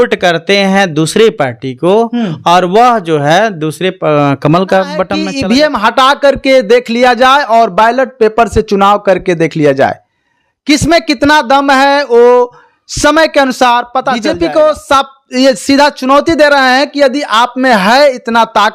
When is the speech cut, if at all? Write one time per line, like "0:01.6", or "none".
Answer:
0:05.2
0:14.2